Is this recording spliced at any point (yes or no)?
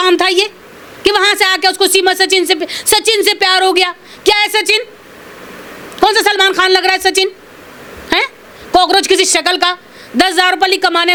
no